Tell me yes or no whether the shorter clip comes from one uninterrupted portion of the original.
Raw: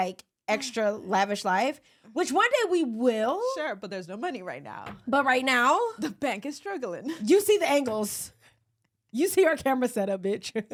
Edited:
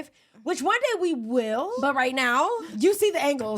no